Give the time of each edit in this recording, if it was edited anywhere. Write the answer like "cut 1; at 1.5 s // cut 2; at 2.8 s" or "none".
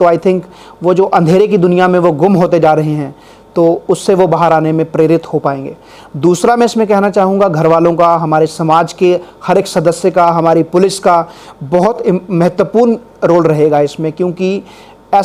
none